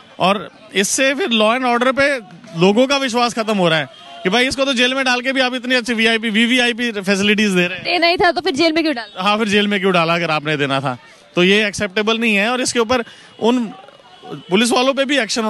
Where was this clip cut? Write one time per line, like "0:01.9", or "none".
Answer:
none

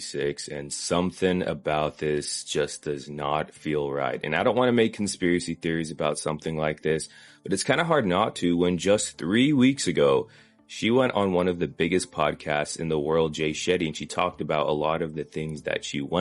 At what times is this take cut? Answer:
none

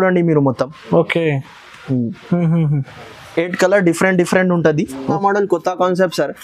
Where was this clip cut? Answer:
0:05.2

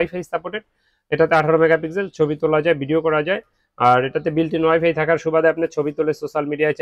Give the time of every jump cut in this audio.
none

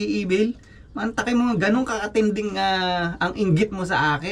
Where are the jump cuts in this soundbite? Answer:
none

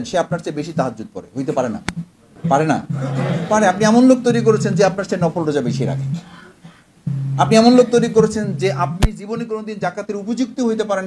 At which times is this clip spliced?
0:02.2

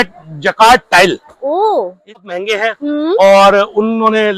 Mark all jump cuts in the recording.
0:02.2

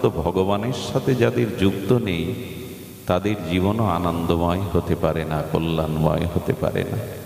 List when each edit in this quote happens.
none

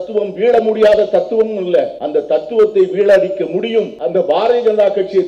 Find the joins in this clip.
0:02.0
0:04.0

